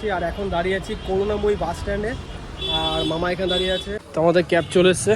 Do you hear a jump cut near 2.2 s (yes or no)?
no